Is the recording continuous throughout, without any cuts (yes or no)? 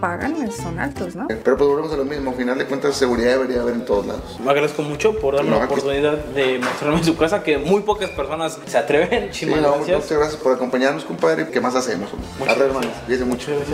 yes